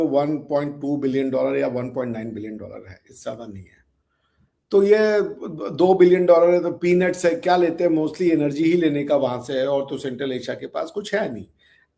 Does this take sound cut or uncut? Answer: uncut